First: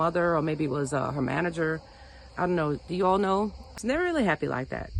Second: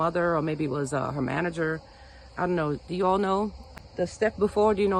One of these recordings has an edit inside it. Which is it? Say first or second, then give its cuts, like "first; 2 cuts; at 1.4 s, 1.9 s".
first; 1 cut; at 3.8 s